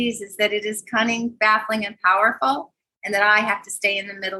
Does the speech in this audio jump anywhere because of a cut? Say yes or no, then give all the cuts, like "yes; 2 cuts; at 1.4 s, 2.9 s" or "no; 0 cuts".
no; 0 cuts